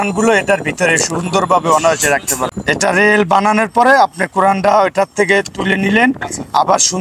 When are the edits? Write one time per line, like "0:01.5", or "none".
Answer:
0:02.5